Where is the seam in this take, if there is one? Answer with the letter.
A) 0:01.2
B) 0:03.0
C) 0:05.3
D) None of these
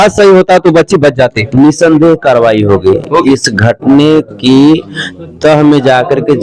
D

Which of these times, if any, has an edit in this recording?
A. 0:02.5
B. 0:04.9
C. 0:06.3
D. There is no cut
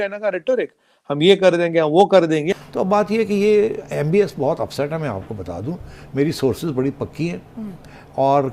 A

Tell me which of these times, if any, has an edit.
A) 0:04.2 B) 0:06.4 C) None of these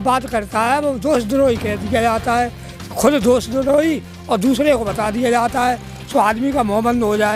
C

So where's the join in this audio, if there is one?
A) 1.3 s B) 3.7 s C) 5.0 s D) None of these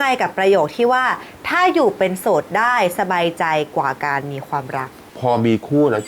C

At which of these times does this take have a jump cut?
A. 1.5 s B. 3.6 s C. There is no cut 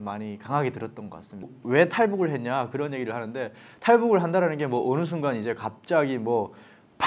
A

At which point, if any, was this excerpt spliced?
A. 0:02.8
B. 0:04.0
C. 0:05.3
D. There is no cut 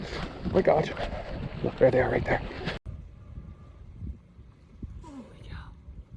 A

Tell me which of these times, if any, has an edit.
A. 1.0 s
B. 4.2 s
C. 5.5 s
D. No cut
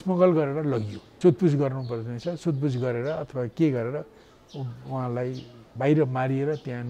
A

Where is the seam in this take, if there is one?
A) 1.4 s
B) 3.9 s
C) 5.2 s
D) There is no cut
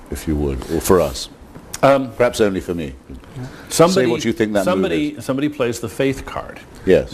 C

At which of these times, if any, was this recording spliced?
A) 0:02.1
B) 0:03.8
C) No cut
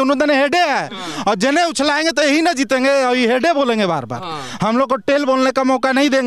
C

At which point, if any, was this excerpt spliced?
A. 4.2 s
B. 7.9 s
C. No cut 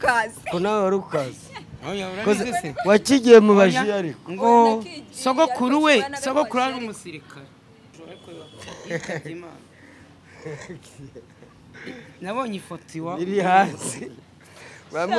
B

